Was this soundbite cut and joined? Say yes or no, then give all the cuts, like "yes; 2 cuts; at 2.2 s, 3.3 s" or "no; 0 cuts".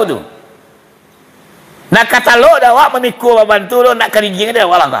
no; 0 cuts